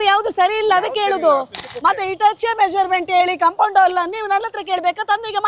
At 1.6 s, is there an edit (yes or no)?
yes